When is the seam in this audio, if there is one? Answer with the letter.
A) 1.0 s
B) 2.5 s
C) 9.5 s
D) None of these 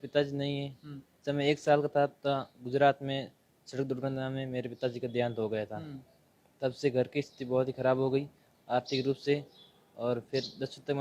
D